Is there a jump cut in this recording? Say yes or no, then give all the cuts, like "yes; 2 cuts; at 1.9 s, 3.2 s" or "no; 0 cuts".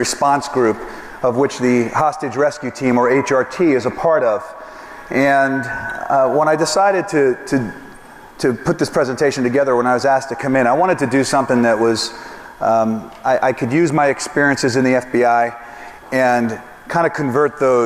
no; 0 cuts